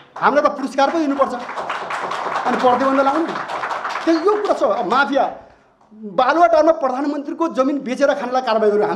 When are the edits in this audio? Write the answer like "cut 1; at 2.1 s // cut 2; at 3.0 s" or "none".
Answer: none